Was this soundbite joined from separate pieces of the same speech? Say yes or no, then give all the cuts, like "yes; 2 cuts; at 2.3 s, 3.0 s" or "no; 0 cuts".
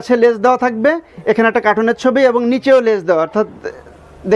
no; 0 cuts